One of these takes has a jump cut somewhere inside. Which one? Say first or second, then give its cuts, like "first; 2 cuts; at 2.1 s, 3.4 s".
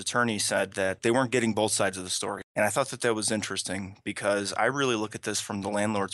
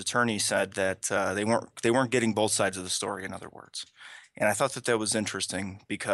first; 2 cuts; at 1.0 s, 2.4 s